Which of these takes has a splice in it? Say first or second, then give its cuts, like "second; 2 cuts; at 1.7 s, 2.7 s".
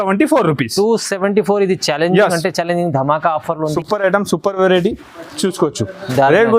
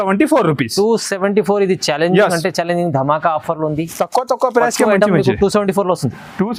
first; 1 cut; at 3.7 s